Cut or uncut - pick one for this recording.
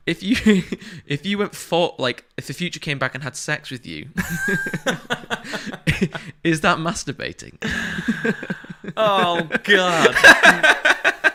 uncut